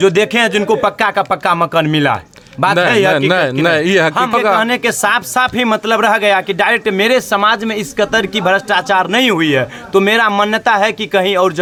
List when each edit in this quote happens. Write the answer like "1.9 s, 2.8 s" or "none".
none